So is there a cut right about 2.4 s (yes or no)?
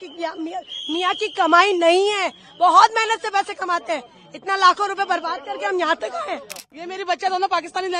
no